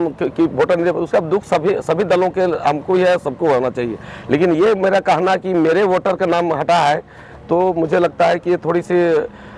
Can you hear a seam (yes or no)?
no